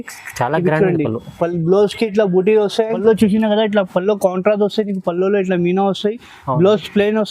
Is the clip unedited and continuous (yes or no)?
no